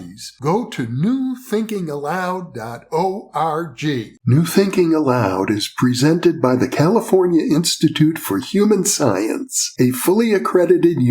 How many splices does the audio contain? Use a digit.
1